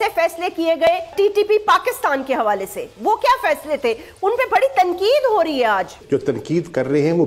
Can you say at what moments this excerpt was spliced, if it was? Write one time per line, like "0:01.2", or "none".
0:01.1
0:06.0